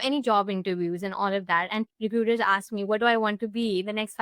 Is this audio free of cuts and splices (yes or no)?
no